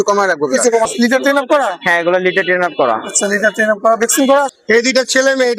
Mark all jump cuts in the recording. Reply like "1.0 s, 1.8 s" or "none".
0.9 s, 4.5 s